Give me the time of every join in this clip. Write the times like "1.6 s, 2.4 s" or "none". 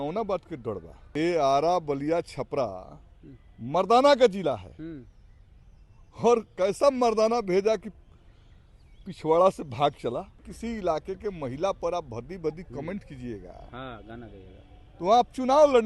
1.0 s, 10.5 s